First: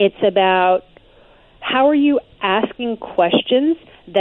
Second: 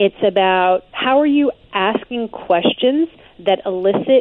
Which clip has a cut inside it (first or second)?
second